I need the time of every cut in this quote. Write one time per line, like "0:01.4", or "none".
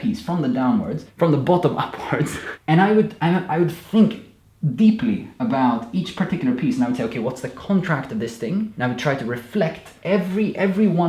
0:01.0
0:02.5
0:05.3
0:08.7
0:09.9

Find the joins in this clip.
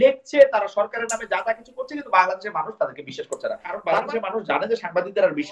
0:03.8

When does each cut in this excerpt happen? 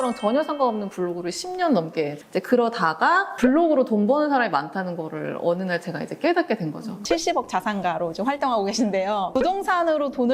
0:02.2
0:03.3
0:07.0
0:09.3

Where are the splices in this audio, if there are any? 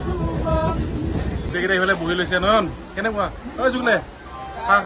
0:01.5

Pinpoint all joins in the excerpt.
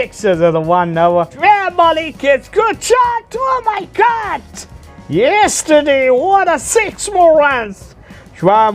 0:01.3

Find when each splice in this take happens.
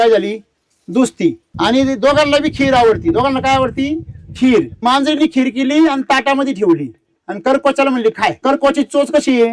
0:01.5
0:04.8
0:08.4

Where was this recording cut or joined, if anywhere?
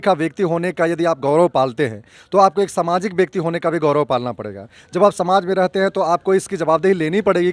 none

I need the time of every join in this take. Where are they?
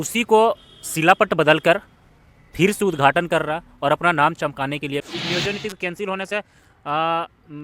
0:05.0

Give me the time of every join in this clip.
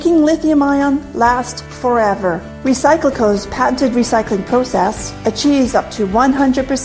0:01.5

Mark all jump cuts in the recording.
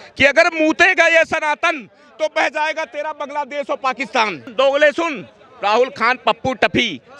0:04.5

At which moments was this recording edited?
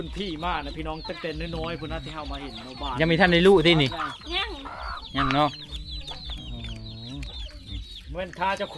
none

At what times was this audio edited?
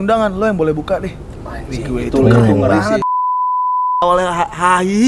0:03.5

